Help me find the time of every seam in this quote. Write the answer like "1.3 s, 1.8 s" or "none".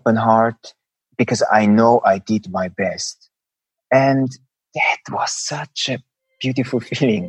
none